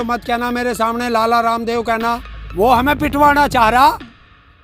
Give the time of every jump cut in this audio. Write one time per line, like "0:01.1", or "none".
0:02.4